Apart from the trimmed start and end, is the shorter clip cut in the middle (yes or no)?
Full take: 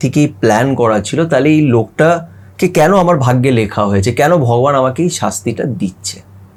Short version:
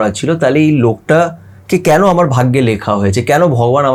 no